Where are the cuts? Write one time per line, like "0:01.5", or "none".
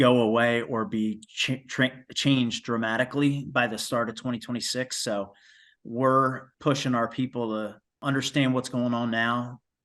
0:06.5
0:07.9